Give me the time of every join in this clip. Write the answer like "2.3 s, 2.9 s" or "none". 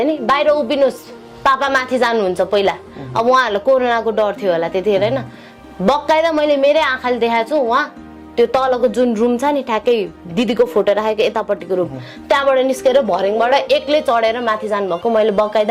none